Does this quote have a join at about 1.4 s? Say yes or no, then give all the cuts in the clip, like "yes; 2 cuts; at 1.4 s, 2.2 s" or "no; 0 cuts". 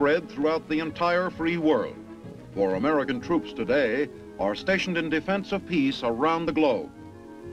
no; 0 cuts